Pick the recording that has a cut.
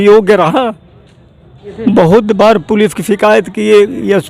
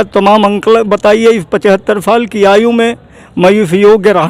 first; 1 cut; at 1.7 s

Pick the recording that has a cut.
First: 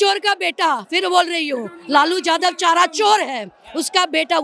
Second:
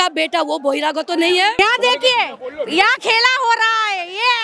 second; 1 cut; at 1.6 s

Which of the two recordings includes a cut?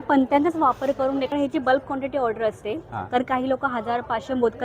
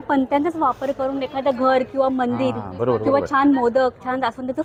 first; 1 cut; at 1.3 s

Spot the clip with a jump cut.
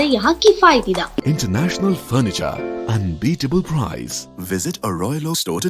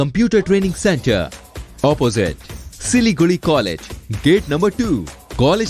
first; 1 cut; at 1.2 s

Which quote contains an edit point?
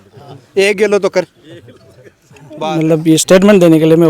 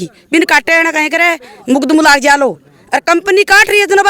first; 1 cut; at 2.7 s

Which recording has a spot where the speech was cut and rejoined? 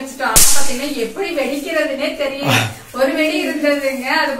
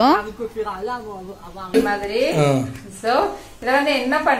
second; 1 cut; at 1.8 s

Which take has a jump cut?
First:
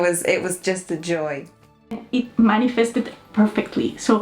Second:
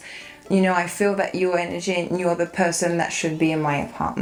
first; 1 cut; at 2.0 s

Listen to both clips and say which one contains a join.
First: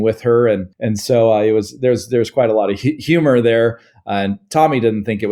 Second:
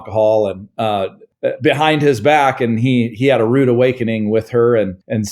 second; 1 cut; at 1.2 s

